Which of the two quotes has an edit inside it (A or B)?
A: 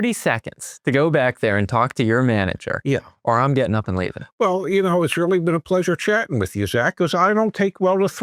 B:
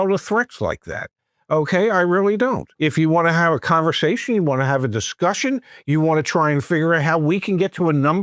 B